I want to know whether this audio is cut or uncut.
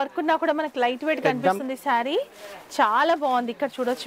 uncut